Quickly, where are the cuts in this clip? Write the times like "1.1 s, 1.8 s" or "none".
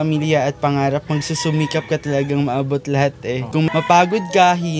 3.5 s